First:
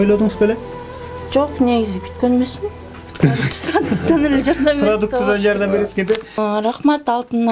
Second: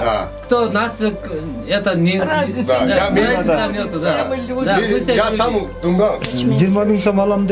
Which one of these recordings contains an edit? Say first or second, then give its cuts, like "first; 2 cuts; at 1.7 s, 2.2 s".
second; 1 cut; at 6.3 s